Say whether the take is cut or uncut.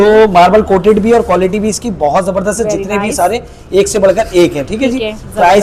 uncut